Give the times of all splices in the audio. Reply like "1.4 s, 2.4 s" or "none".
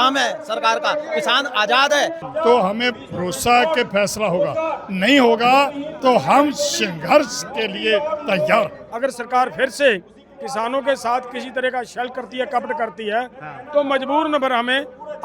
2.2 s, 8.8 s